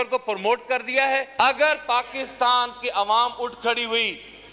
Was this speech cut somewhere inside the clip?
yes; 1 cut; at 1.3 s

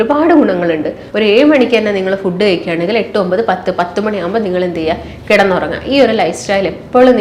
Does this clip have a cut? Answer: yes; 1 cut; at 1.0 s

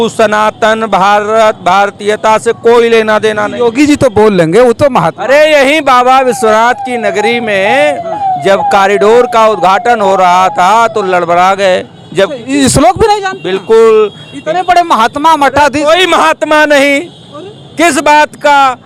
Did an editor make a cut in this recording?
no; 0 cuts

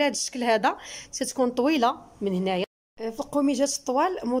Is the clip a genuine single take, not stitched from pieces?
no; 1 cut; at 2.6 s

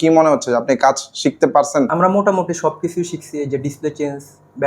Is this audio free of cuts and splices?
no; 1 cut; at 1.9 s

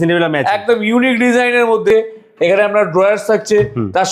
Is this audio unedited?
no; 1 cut; at 1.9 s

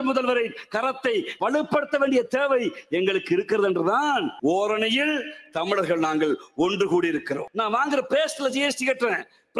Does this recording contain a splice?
yes; 3 cuts; at 1.3 s, 4.3 s, 7.5 s

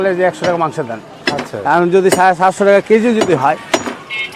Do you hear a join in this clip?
no; 0 cuts

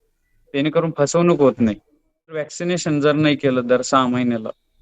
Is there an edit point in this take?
yes; 1 cut; at 2.5 s

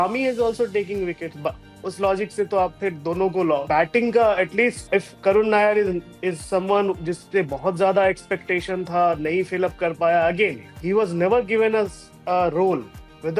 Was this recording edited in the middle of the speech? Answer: yes; 3 cuts; at 3.6 s, 4.8 s, 10.7 s

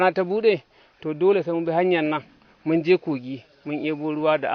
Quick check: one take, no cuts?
yes; 0 cuts

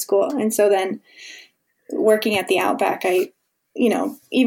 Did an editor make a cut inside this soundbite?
no; 0 cuts

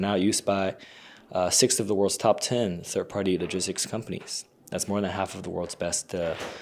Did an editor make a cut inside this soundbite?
no; 0 cuts

